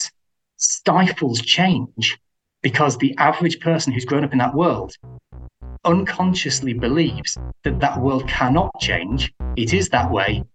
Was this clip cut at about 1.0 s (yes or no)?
no